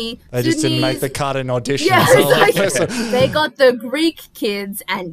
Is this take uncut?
no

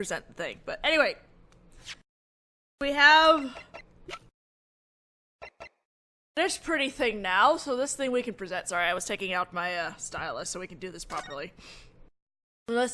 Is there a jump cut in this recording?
yes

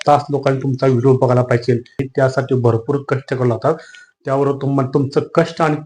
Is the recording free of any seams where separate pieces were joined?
no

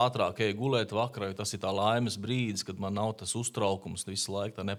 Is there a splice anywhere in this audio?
no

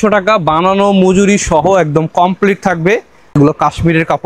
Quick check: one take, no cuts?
no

